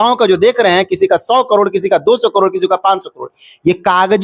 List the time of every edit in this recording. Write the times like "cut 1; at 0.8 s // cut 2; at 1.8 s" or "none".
none